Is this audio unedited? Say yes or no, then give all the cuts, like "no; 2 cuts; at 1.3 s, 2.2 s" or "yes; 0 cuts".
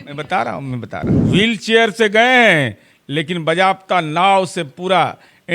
no; 1 cut; at 1.1 s